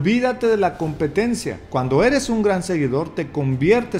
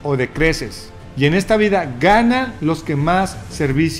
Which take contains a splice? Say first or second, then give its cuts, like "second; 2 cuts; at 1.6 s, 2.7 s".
first; 1 cut; at 1.6 s